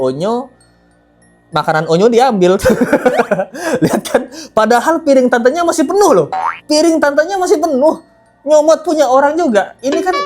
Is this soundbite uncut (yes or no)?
yes